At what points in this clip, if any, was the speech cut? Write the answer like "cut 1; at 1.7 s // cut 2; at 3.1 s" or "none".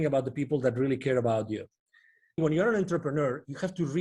cut 1; at 2.4 s